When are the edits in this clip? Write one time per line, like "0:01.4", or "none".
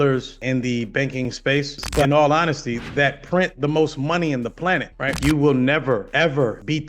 0:02.0
0:05.1